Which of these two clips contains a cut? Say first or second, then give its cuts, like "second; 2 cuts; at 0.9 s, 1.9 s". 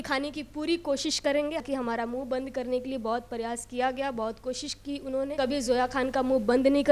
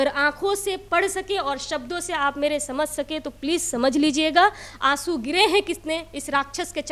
first; 2 cuts; at 1.6 s, 5.3 s